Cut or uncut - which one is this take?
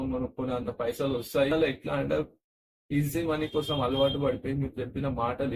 cut